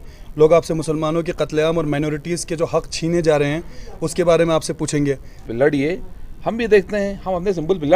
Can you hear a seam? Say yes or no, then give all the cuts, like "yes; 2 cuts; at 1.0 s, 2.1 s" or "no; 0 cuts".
yes; 1 cut; at 5.4 s